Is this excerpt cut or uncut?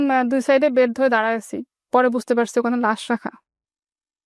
uncut